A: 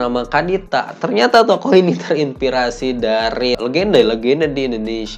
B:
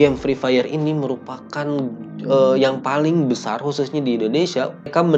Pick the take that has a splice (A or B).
A